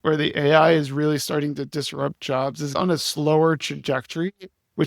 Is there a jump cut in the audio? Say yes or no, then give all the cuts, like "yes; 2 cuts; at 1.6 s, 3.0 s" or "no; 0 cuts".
yes; 1 cut; at 2.8 s